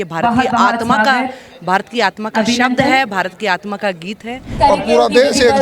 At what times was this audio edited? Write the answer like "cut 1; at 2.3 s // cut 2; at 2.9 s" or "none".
cut 1; at 4.5 s